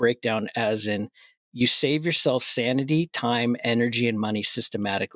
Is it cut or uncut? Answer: uncut